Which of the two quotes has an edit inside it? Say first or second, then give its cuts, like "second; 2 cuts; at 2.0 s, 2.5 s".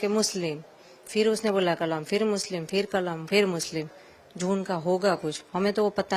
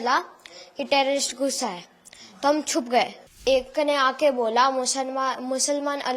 second; 1 cut; at 3.4 s